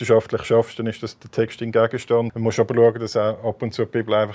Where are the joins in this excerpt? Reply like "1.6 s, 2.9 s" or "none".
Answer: 2.3 s

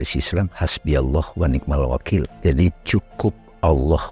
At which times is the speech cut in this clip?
2.3 s

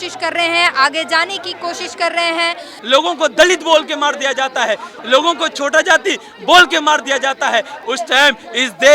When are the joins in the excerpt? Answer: 2.7 s, 4.9 s, 7.8 s

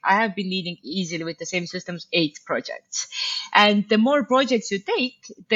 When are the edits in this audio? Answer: none

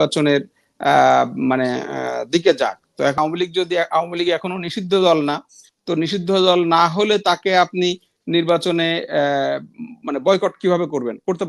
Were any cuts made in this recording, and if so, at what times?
3.2 s

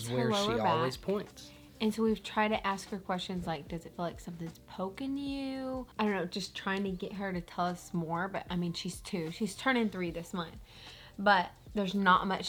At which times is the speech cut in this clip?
none

